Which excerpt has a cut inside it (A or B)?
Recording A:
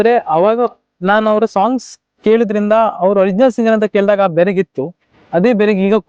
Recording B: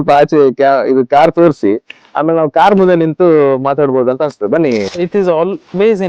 B